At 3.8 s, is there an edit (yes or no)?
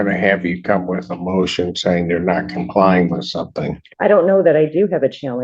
yes